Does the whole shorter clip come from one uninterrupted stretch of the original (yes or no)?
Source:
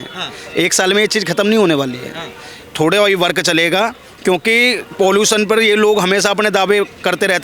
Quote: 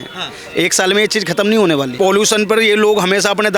no